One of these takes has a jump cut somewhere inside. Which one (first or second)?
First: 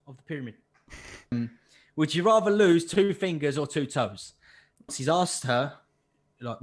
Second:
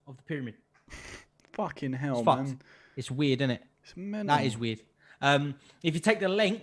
first